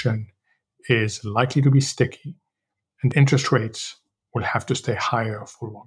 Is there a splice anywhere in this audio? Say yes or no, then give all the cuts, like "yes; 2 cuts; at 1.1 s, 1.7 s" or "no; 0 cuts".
yes; 1 cut; at 3.1 s